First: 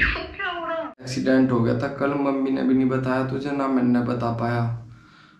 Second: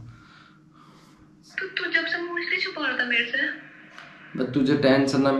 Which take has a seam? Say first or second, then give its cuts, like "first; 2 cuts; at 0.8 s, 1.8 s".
first; 1 cut; at 1.1 s